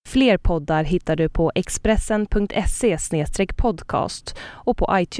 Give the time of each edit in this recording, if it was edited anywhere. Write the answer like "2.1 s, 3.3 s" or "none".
2.7 s